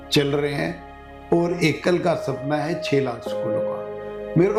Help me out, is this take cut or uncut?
uncut